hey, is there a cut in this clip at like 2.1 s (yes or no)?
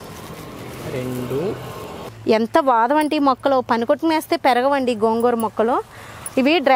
yes